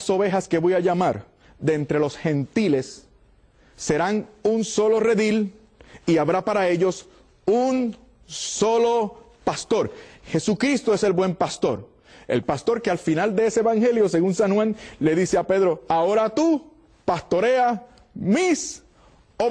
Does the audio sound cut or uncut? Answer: uncut